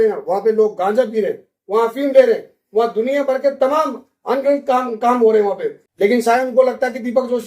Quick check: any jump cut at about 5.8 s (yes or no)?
yes